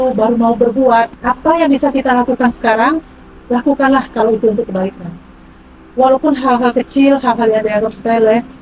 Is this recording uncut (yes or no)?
no